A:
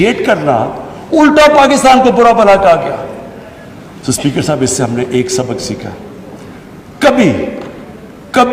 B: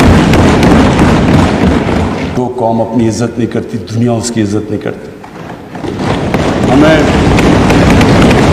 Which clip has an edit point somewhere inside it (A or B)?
B